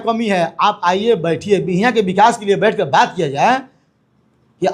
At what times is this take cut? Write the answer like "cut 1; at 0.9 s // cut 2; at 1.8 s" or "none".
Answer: none